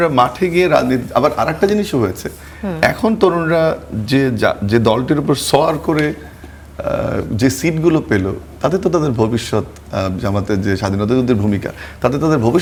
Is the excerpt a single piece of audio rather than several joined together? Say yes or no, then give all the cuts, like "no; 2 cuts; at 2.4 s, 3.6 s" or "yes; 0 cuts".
yes; 0 cuts